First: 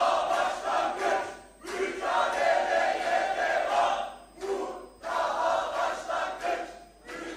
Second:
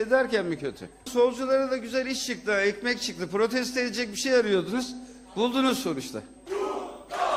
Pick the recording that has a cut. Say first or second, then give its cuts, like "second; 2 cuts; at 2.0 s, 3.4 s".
second; 2 cuts; at 1.1 s, 6.4 s